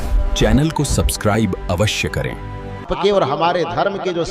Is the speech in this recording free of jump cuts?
no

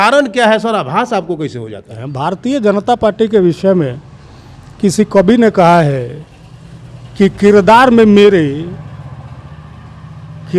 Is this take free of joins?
no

